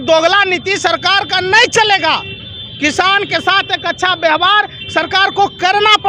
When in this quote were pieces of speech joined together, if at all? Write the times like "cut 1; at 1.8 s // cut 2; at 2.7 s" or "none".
none

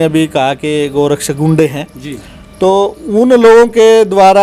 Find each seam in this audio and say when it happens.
none

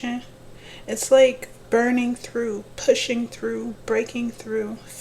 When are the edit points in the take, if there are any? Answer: cut 1; at 1.6 s

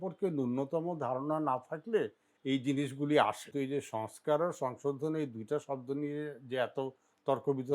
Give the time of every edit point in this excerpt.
cut 1; at 3.4 s

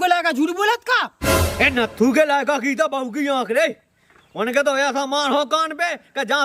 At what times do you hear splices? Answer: none

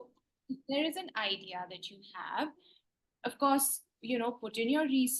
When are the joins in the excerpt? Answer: none

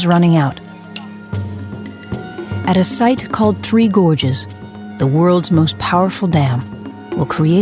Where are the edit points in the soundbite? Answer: cut 1; at 2.3 s

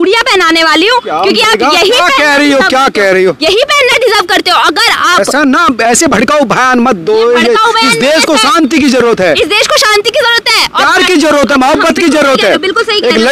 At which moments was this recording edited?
none

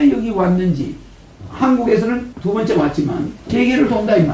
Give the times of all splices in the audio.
cut 1; at 3.4 s

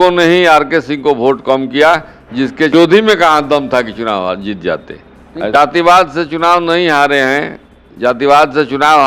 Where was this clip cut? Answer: cut 1; at 2.7 s // cut 2; at 5.6 s

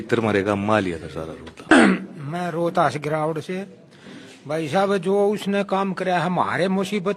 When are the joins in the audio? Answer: cut 1; at 1.7 s

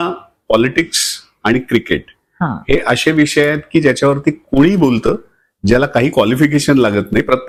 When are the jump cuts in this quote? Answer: none

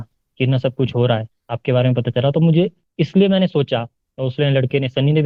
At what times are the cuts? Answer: none

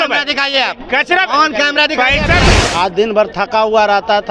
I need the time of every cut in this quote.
cut 1; at 2.5 s

